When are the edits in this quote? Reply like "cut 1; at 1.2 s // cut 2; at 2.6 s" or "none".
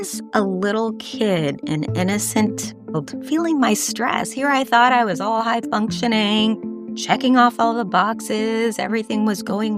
none